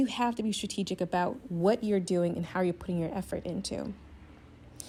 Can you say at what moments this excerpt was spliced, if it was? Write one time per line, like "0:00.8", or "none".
none